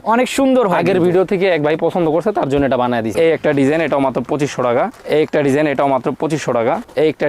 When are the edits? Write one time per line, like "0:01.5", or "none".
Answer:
0:03.1